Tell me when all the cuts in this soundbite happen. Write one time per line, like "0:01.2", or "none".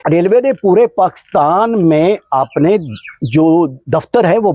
none